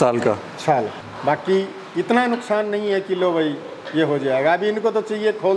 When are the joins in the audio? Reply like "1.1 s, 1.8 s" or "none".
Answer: 1.0 s